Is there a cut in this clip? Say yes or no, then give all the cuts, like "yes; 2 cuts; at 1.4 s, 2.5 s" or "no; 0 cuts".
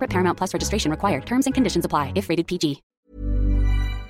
yes; 1 cut; at 2.9 s